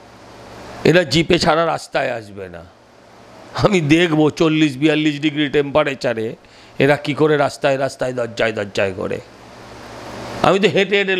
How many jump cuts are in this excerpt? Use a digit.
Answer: 0